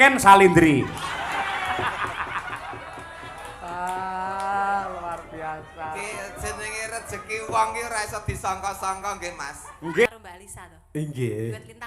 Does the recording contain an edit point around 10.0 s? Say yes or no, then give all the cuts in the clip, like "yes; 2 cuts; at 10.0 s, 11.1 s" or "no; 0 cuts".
yes; 1 cut; at 10.0 s